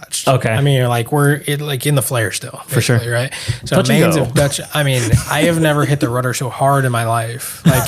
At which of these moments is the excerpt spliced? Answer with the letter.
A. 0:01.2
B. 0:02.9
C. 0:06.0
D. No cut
D